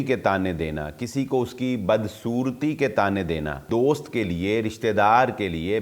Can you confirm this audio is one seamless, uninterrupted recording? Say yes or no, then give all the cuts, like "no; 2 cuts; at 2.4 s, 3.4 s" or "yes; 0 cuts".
no; 1 cut; at 3.6 s